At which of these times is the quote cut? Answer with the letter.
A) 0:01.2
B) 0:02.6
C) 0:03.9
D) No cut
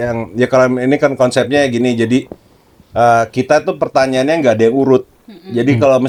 D